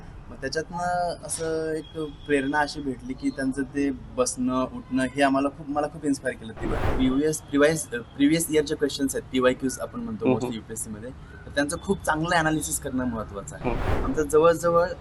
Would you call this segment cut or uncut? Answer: cut